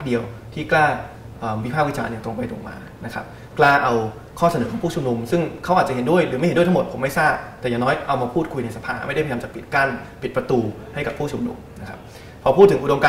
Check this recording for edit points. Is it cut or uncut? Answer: uncut